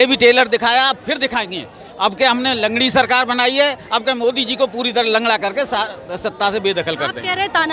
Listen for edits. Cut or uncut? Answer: uncut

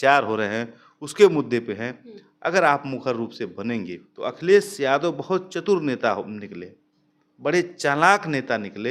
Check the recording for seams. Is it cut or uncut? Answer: cut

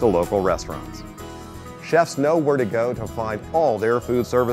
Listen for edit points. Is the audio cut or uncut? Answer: uncut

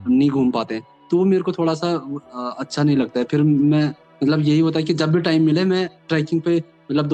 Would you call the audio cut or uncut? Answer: uncut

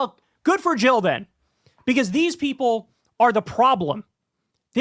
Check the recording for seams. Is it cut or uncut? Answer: uncut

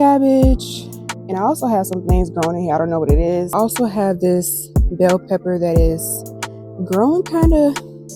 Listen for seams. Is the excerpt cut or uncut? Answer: cut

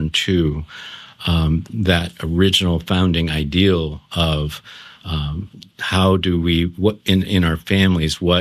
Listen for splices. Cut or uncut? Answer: uncut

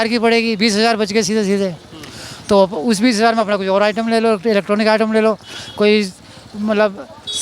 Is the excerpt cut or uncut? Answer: uncut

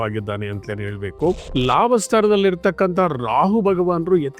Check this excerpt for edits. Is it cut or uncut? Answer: cut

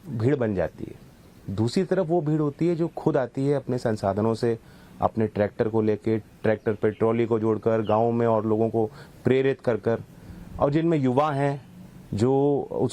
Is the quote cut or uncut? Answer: uncut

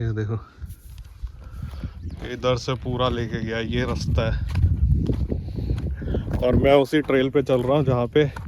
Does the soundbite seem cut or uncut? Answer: uncut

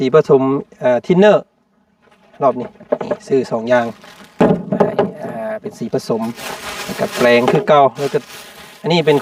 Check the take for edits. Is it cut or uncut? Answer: uncut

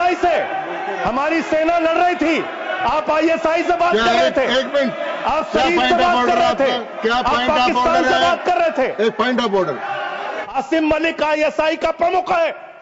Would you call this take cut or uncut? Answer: cut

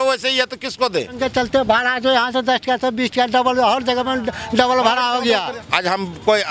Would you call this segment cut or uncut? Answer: cut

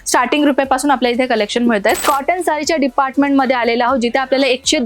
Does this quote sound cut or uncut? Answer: cut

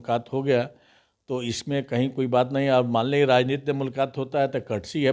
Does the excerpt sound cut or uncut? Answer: uncut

